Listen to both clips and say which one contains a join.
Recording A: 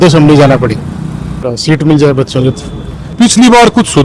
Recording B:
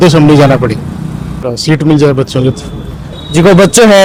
A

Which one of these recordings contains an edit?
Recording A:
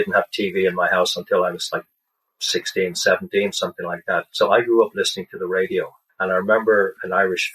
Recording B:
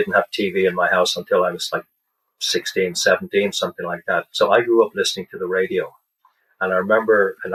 A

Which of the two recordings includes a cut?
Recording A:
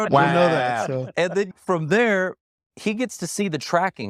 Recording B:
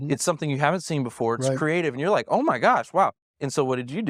A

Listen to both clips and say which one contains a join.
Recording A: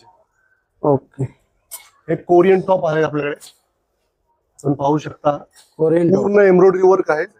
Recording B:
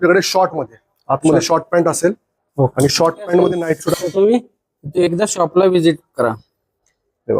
B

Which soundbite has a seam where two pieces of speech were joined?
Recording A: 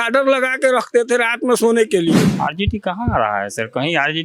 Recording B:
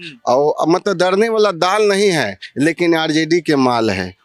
A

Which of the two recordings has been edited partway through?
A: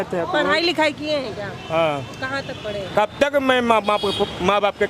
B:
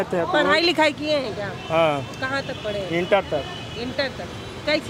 A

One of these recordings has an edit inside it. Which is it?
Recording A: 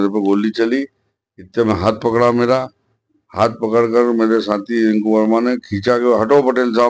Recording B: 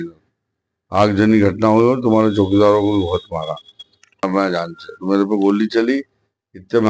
B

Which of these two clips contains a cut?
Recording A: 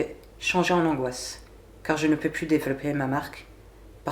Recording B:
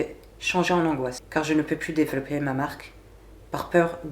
B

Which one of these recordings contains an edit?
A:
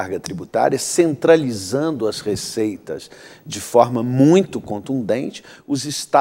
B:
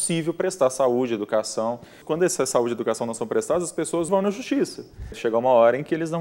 B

